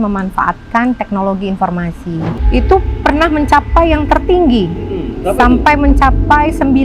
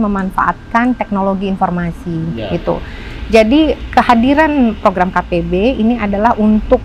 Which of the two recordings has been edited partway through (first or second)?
first